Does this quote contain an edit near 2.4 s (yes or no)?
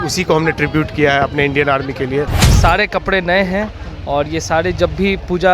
yes